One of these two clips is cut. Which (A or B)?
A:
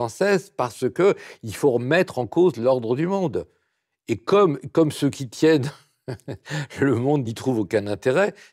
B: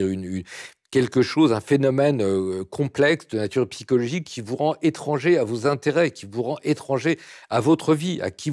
A